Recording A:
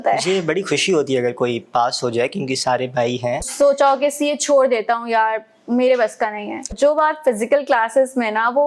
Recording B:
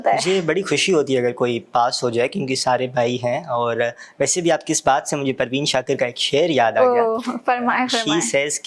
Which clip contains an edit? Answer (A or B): A